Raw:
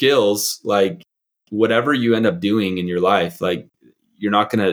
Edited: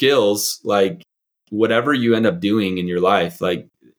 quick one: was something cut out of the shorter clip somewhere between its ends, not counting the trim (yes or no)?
no